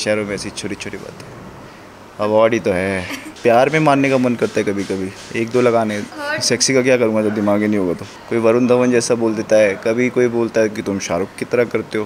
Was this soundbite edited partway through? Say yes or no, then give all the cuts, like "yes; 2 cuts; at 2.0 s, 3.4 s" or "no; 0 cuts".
yes; 3 cuts; at 3.3 s, 6.1 s, 8.1 s